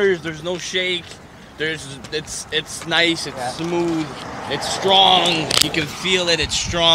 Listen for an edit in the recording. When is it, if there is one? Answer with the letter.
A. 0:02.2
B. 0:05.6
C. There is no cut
C